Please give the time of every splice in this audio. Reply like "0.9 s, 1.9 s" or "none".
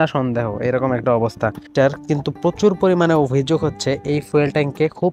1.7 s